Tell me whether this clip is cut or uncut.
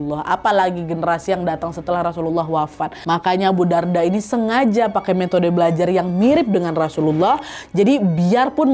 cut